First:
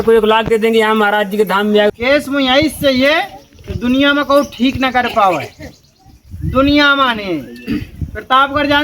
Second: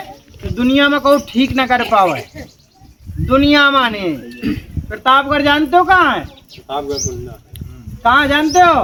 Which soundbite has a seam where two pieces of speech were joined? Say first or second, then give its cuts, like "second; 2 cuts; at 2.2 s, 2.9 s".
first; 1 cut; at 1.9 s